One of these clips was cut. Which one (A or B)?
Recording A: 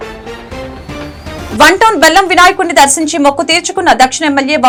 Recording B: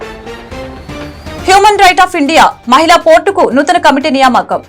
B